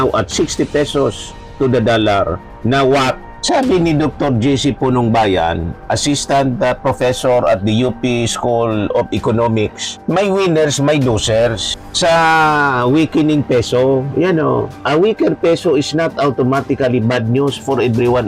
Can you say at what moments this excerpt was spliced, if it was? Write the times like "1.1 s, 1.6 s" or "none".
none